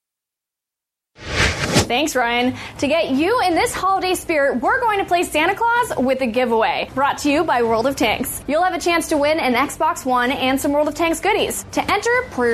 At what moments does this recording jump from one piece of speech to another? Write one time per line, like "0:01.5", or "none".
0:01.8